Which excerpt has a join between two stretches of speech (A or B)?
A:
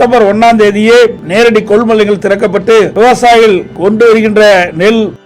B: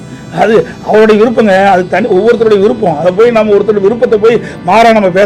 A